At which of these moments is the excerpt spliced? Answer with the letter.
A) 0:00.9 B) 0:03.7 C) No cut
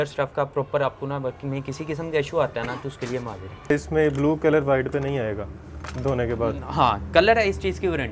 B